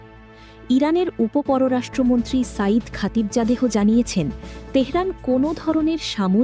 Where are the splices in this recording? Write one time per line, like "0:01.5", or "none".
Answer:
none